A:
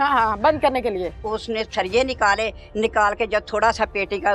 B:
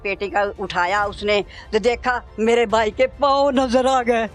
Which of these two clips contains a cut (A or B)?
A